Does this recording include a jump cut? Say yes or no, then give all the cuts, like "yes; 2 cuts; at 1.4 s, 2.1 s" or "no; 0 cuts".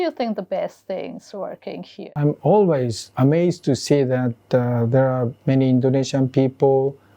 yes; 1 cut; at 2.1 s